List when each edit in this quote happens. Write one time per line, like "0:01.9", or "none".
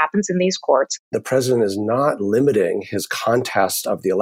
0:01.1